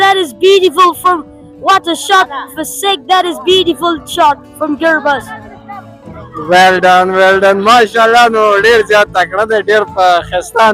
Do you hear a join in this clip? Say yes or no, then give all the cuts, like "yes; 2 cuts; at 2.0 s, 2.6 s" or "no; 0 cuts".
no; 0 cuts